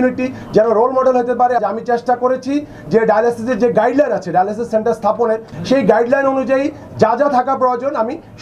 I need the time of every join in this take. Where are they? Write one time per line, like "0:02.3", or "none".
0:01.6
0:05.5